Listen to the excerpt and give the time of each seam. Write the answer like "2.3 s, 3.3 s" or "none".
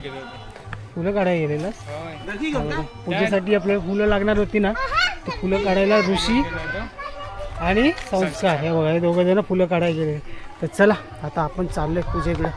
none